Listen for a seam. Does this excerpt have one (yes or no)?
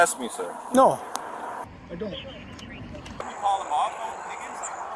yes